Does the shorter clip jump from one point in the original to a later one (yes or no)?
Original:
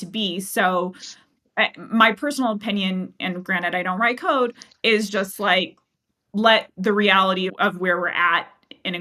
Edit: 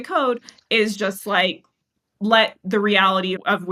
no